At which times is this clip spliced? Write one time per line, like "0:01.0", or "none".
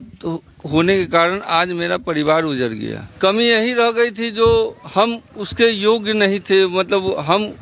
0:03.0

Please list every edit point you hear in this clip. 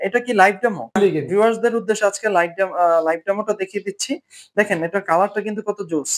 0:01.0

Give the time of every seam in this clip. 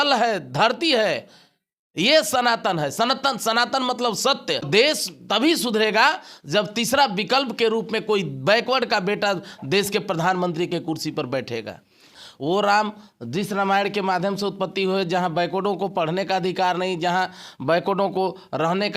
0:04.7
0:12.1

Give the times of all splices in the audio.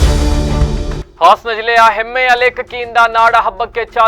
0:01.0

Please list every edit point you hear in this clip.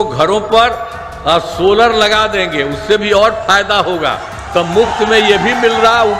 none

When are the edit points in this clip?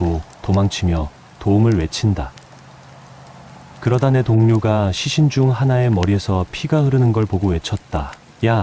0:02.3
0:03.8

